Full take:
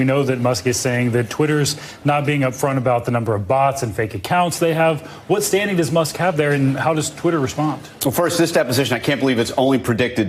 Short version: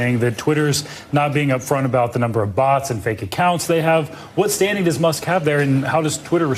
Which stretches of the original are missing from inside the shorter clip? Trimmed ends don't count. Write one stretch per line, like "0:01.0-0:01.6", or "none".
none

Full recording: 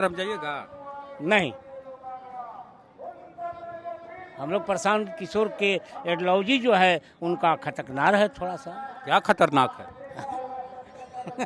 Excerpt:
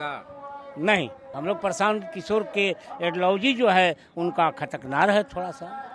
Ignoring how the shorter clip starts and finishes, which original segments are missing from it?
0:01.7-0:04.3

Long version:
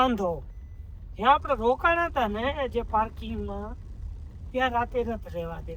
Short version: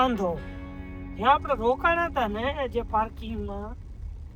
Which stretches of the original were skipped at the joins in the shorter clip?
none

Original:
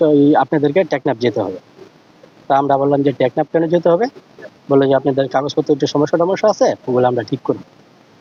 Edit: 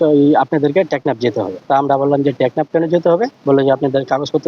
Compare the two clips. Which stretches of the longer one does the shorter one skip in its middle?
0:01.6-0:02.4
0:04.2-0:04.6

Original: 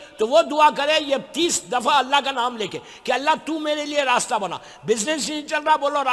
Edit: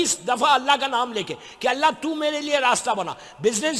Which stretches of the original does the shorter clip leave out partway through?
none

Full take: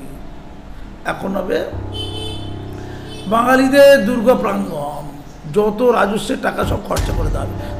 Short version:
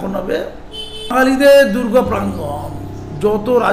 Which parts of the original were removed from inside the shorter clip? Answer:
0:02.4-0:03.5

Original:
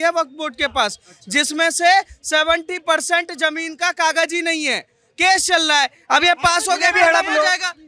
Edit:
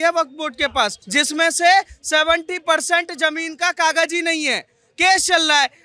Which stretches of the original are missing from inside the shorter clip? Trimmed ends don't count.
0:01.0-0:01.2

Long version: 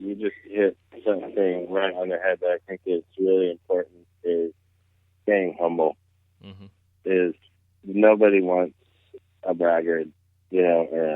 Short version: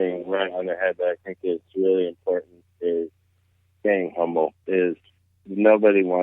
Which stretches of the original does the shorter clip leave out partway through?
0:06.0-0:07.0

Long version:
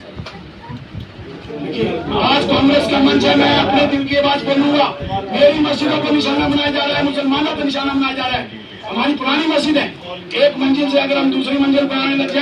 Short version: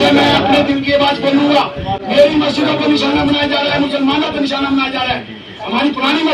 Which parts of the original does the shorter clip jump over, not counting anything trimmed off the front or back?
none

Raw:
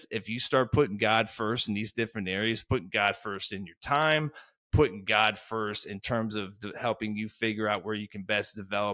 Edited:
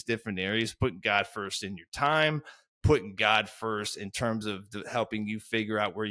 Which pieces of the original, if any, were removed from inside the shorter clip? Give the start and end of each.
none

